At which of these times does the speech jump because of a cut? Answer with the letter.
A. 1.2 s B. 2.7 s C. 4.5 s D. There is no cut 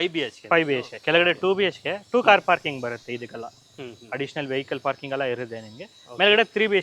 D